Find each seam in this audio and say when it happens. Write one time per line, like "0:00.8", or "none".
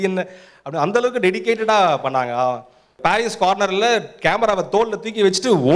0:02.9